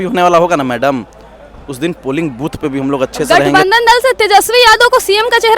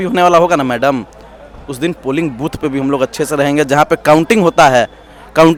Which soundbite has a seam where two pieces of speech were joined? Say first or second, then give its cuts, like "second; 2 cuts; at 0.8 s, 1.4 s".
first; 1 cut; at 3.3 s